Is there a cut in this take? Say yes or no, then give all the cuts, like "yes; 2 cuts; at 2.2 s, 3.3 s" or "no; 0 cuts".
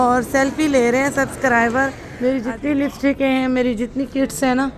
yes; 1 cut; at 2.3 s